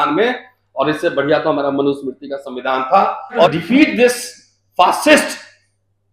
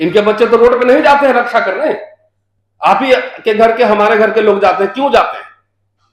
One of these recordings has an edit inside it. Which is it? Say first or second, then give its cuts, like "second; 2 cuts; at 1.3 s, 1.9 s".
first; 1 cut; at 3.5 s